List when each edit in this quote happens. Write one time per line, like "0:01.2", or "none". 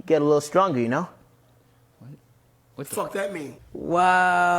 0:03.6